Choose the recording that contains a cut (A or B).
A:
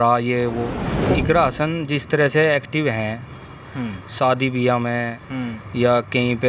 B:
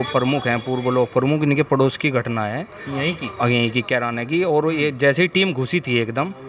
A